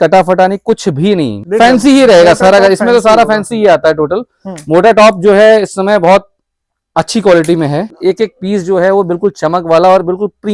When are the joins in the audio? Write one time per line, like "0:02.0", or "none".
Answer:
0:01.4
0:07.9